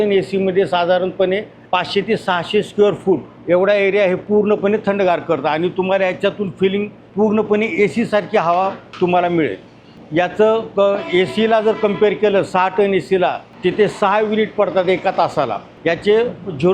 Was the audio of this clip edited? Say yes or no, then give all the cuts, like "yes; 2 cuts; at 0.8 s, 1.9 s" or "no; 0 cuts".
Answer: yes; 7 cuts; at 1.5 s, 3.3 s, 7.0 s, 8.8 s, 9.9 s, 13.5 s, 15.7 s